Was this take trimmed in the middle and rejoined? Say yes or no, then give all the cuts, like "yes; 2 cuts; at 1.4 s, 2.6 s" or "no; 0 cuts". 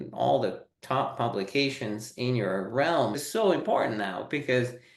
yes; 1 cut; at 3.2 s